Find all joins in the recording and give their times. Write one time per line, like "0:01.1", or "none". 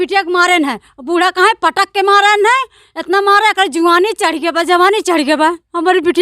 none